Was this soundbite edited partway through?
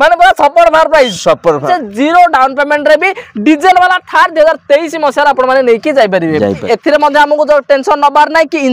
yes; 2 cuts; at 1.6 s, 6.6 s

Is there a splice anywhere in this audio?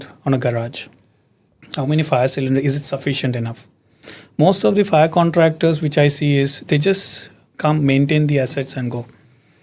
no; 0 cuts

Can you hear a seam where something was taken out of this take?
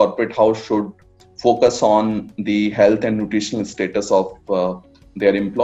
no; 0 cuts

